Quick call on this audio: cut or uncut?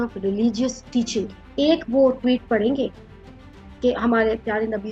cut